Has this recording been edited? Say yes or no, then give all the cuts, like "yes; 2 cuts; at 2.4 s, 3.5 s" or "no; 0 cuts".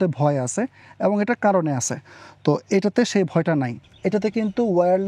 yes; 1 cut; at 3.8 s